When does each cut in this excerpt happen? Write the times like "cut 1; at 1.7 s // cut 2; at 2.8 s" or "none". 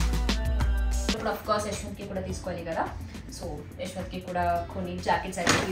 cut 1; at 1.2 s